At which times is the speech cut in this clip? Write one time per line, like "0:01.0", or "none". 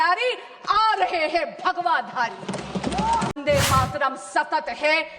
0:03.3